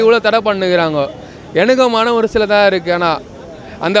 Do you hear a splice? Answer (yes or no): no